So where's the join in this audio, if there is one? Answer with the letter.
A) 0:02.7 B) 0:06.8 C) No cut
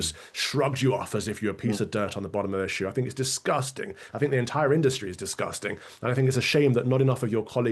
C